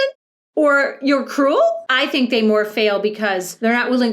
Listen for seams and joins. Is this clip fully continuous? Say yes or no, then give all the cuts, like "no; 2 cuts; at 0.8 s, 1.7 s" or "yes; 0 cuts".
no; 1 cut; at 1.8 s